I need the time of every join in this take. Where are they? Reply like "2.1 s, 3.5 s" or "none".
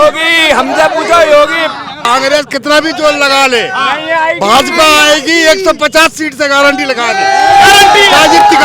2.0 s